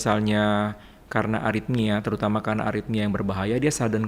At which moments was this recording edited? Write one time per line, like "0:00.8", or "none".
none